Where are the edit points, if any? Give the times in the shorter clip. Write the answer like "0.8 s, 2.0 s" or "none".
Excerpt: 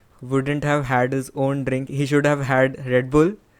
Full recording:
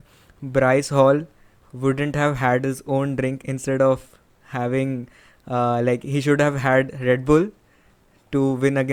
1.9 s